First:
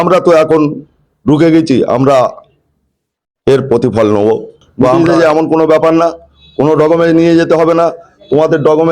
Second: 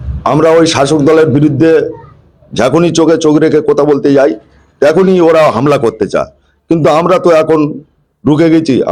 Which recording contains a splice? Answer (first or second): first